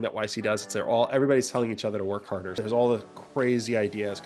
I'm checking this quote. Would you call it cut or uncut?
cut